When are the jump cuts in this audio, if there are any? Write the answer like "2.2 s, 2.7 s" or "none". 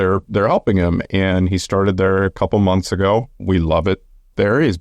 3.3 s